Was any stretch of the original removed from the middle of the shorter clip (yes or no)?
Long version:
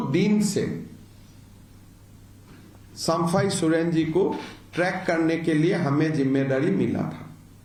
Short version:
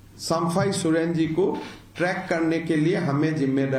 no